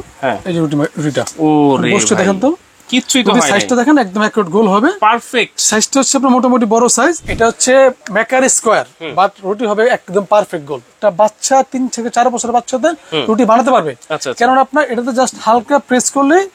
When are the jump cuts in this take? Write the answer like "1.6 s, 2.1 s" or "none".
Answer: 7.3 s, 10.9 s